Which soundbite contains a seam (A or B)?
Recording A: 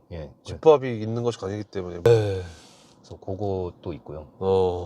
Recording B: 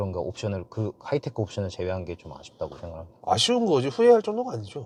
A